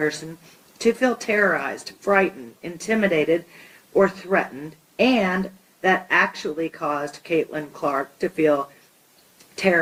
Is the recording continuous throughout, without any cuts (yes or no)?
yes